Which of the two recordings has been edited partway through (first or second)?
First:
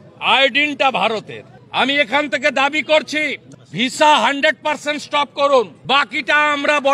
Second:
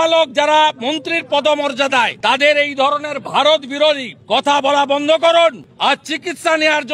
first